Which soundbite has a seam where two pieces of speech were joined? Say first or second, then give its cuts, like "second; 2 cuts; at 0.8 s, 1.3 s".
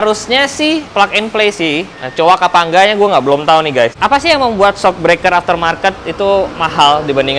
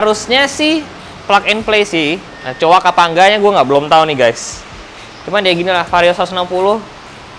first; 4 cuts; at 0.9 s, 2.0 s, 3.9 s, 6.6 s